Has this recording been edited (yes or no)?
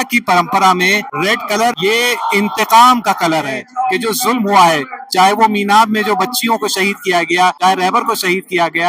yes